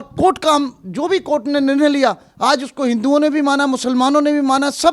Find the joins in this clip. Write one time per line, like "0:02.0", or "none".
none